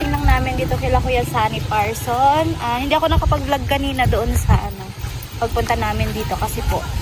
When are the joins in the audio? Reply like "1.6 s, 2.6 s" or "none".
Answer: none